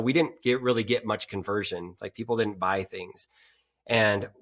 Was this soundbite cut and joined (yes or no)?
no